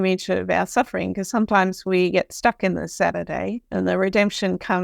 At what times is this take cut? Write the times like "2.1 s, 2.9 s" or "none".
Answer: 3.6 s